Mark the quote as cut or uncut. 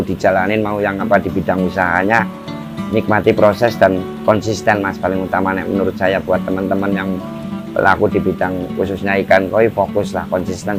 uncut